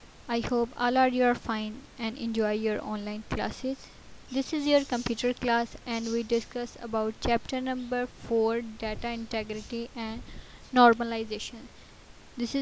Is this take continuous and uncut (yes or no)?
yes